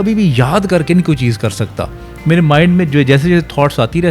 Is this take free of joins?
yes; 0 cuts

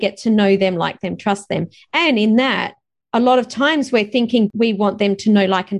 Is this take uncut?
no; 1 cut; at 4.5 s

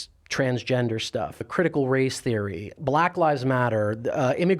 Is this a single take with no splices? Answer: no; 2 cuts; at 1.4 s, 2.8 s

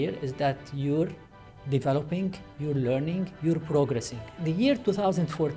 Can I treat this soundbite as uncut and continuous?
no; 1 cut; at 4.2 s

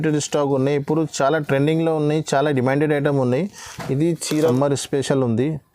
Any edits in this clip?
yes; 1 cut; at 4.5 s

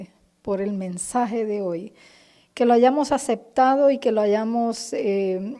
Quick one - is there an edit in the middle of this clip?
yes; 1 cut; at 3.7 s

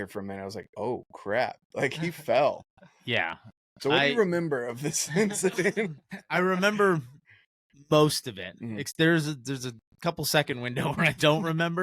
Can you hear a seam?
no; 0 cuts

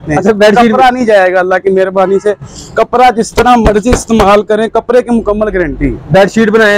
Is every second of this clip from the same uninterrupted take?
yes; 0 cuts

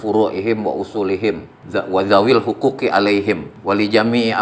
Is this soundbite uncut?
no; 2 cuts; at 1.5 s, 3.5 s

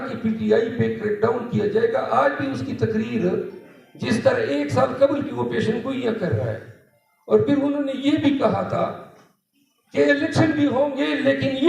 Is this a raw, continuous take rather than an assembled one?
yes; 0 cuts

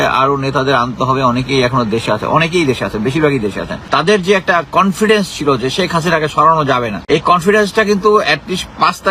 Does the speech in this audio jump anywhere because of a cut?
yes; 2 cuts; at 3.7 s, 6.9 s

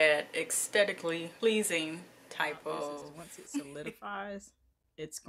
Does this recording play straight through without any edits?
no; 1 cut; at 3.7 s

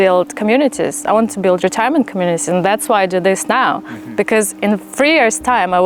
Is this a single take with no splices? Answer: yes; 0 cuts

